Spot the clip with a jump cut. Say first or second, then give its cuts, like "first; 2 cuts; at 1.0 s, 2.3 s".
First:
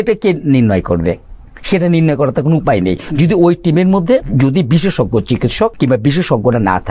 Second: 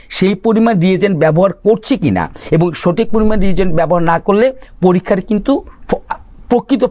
first; 2 cuts; at 4.3 s, 5.7 s